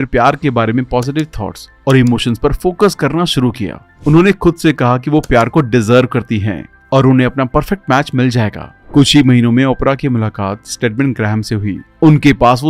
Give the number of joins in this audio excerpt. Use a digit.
1